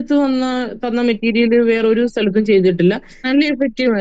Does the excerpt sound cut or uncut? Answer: cut